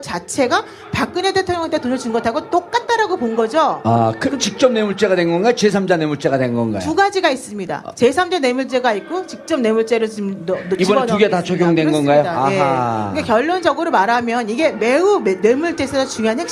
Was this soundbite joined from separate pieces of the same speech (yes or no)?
no